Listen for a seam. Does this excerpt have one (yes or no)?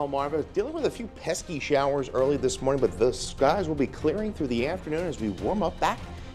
no